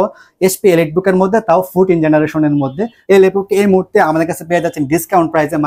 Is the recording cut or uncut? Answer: uncut